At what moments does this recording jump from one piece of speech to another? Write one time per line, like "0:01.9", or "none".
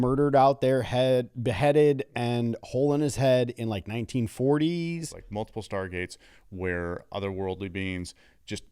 0:05.2